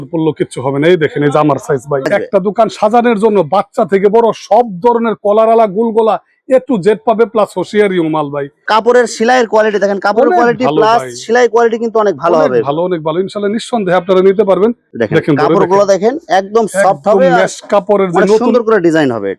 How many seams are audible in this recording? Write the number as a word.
three